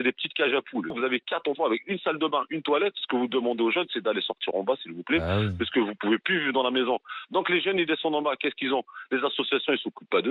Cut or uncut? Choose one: cut